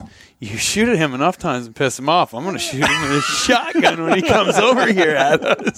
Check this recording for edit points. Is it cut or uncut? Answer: uncut